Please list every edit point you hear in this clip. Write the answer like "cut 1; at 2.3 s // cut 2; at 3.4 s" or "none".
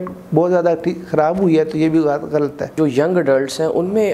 cut 1; at 2.7 s

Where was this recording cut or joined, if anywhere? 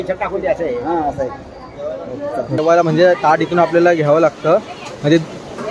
cut 1; at 2.6 s

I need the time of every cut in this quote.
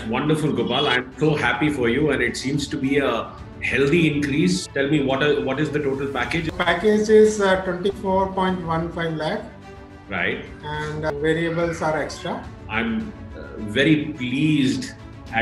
cut 1; at 4.6 s // cut 2; at 6.5 s // cut 3; at 12.6 s

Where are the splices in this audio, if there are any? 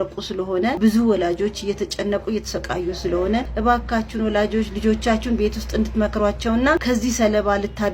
cut 1; at 0.8 s // cut 2; at 3.5 s // cut 3; at 6.8 s

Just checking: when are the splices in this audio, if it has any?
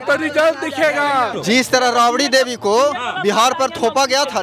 cut 1; at 1.4 s

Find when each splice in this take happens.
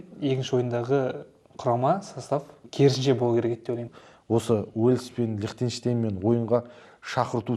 cut 1; at 2.6 s // cut 2; at 3.9 s

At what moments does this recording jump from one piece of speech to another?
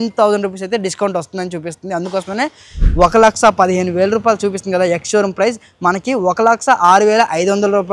cut 1; at 2.8 s

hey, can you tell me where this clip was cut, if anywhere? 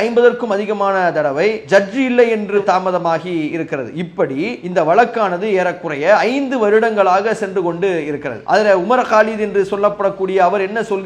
cut 1; at 1.6 s // cut 2; at 2.6 s // cut 3; at 4.6 s // cut 4; at 8.3 s

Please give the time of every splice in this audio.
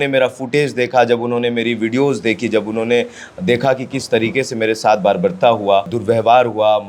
cut 1; at 6.0 s

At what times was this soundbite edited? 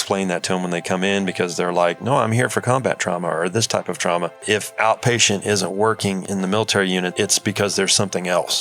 cut 1; at 4.4 s // cut 2; at 6.2 s // cut 3; at 7.1 s

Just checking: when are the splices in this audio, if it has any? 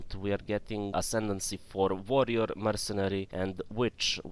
cut 1; at 0.9 s // cut 2; at 3.3 s

